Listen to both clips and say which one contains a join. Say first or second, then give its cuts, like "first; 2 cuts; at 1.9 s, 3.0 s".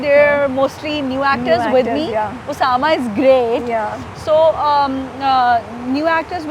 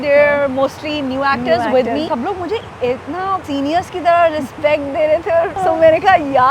second; 3 cuts; at 2.1 s, 3.4 s, 5.5 s